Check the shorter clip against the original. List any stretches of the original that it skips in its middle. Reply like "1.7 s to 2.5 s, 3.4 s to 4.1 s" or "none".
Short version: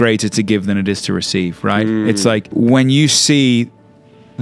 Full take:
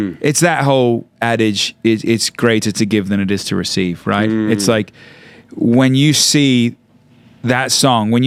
4.9 s to 5.5 s